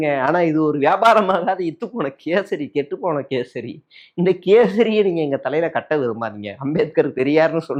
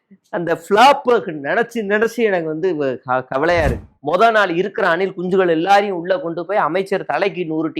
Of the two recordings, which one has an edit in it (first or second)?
second